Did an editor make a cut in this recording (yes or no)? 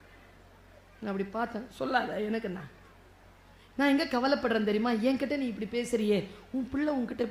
no